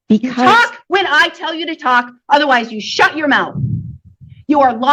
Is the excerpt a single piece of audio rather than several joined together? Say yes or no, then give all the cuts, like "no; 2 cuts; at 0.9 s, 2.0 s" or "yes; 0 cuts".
yes; 0 cuts